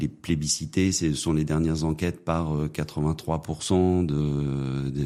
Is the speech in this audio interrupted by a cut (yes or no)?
no